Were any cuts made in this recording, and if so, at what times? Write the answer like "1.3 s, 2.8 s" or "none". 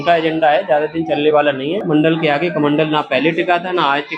1.9 s